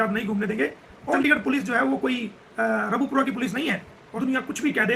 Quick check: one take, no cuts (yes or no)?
no